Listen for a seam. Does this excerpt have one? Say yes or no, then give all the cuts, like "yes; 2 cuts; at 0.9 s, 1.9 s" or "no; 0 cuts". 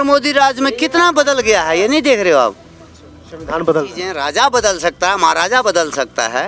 yes; 1 cut; at 4.0 s